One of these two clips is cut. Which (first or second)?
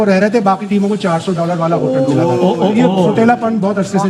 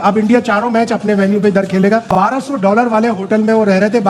second